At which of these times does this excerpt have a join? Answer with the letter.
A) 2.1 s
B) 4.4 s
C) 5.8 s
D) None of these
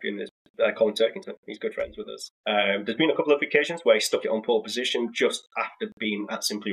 A